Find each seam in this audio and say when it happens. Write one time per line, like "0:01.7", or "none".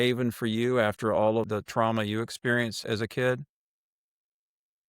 0:01.5
0:02.8